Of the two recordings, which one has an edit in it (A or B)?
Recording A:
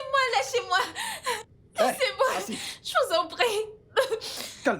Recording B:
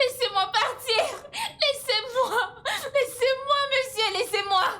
A